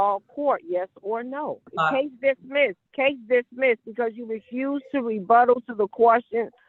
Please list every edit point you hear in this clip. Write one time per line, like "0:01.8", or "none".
0:01.7
0:02.8